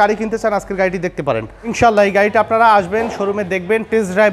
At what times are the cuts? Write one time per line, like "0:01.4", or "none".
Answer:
0:01.7